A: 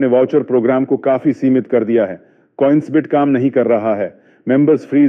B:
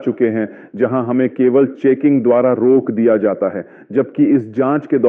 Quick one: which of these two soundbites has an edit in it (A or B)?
B